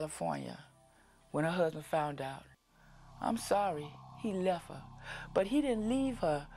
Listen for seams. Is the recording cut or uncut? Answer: uncut